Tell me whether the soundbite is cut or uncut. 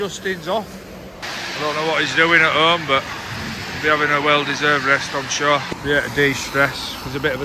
cut